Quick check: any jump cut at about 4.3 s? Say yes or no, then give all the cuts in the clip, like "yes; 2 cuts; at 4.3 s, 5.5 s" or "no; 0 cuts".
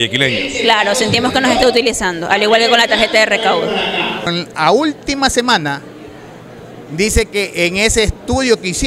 yes; 1 cut; at 4.3 s